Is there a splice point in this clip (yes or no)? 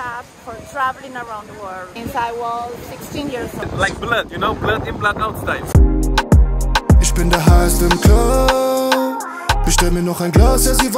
yes